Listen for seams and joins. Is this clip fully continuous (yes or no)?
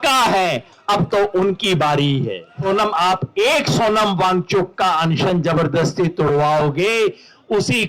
no